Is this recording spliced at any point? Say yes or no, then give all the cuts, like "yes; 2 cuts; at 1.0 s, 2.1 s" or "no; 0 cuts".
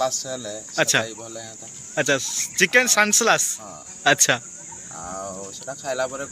no; 0 cuts